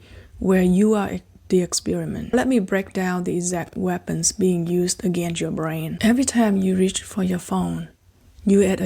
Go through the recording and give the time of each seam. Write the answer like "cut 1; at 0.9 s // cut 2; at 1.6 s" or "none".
cut 1; at 2.3 s // cut 2; at 5.9 s